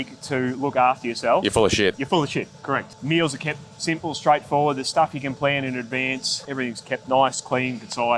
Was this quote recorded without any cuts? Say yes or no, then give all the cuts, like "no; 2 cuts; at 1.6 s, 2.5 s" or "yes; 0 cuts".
no; 2 cuts; at 2.9 s, 6.5 s